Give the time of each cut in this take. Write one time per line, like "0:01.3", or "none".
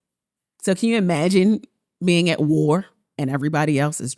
0:03.0